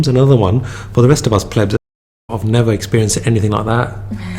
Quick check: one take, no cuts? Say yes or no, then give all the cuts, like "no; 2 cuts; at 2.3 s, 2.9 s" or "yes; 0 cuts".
no; 1 cut; at 1.8 s